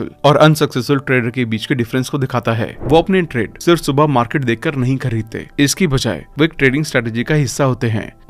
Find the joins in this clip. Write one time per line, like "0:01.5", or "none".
0:02.7